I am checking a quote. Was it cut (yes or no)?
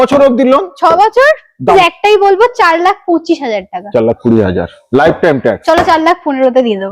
yes